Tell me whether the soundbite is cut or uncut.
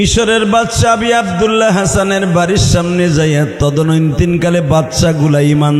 uncut